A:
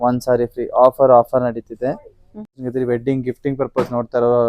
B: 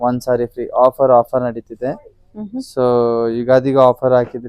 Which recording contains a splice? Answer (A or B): A